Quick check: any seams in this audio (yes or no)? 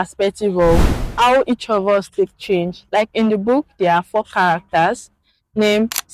yes